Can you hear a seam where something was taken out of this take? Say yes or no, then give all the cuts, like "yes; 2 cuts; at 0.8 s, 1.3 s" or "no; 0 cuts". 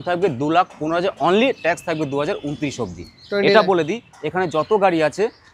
no; 0 cuts